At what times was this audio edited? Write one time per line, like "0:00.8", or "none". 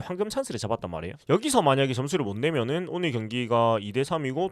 0:01.2